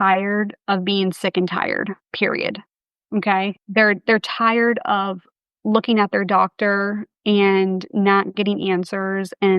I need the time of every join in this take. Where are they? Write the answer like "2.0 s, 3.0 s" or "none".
2.0 s